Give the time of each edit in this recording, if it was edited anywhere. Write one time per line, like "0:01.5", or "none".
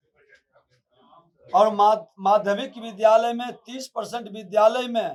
none